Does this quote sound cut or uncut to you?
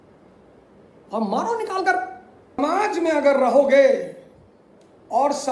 cut